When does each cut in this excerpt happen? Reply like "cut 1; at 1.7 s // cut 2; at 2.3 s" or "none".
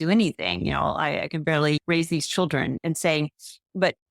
cut 1; at 1.8 s // cut 2; at 2.8 s